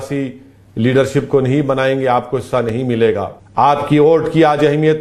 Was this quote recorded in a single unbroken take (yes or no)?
no